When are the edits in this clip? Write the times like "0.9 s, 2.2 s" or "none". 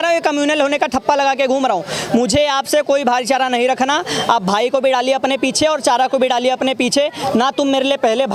none